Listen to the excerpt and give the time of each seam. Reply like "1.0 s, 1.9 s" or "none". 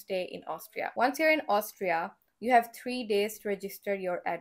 0.9 s